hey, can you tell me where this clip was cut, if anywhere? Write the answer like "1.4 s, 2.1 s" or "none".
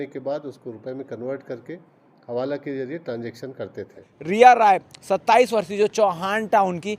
4.2 s

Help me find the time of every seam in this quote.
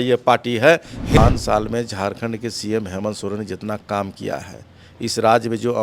1.2 s

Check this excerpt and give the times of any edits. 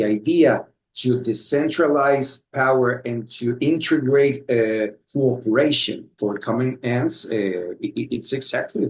5.0 s, 6.1 s

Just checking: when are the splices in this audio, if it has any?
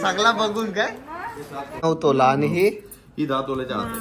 1.8 s

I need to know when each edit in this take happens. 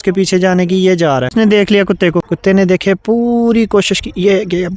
1.3 s, 2.3 s

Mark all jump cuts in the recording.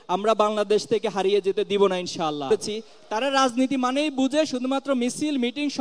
2.5 s

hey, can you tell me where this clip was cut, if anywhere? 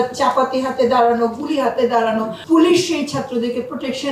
2.3 s

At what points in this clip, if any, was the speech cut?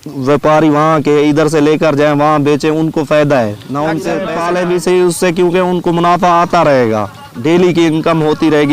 4.3 s

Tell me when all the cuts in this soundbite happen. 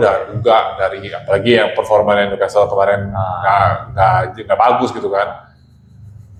none

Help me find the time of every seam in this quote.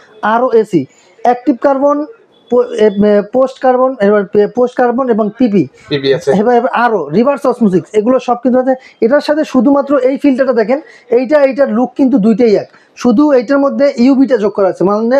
none

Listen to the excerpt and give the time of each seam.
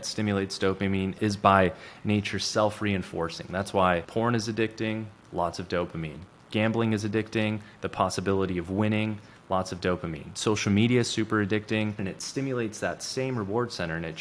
1.2 s, 4.1 s, 12.1 s

